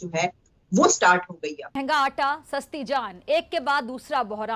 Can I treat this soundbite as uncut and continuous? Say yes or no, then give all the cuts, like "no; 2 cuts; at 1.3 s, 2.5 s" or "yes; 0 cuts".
no; 1 cut; at 1.7 s